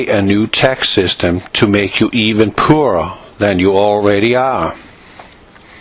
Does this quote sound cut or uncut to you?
cut